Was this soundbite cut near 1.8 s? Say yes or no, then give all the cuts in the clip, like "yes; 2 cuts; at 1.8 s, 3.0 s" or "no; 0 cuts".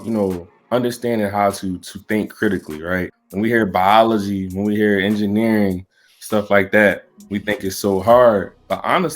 no; 1 cut; at 3.2 s